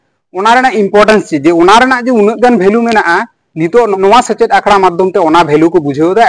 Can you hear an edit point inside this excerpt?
yes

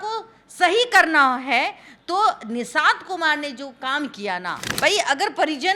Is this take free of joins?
no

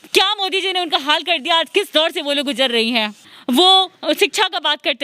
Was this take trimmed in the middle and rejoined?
yes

